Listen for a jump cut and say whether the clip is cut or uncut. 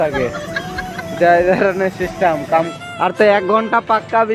cut